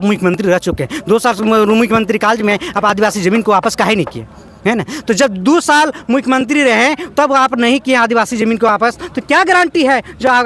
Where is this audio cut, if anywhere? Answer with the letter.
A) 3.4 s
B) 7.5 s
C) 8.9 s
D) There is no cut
D